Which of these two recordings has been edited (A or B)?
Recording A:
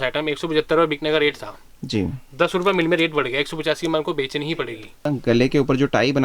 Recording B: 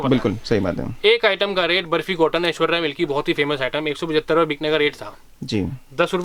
A